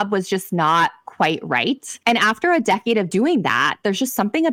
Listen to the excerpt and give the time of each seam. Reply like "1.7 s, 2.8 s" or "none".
1.9 s, 3.1 s